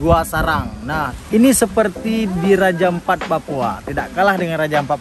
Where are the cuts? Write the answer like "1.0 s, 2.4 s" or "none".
1.1 s